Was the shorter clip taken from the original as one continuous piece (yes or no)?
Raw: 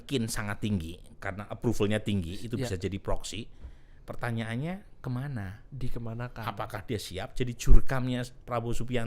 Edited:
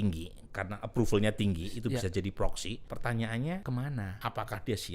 no